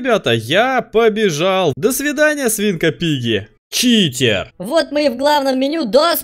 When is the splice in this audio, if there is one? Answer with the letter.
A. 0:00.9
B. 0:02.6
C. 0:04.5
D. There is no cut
C